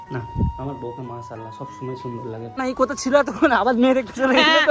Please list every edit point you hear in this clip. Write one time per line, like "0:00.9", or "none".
0:02.6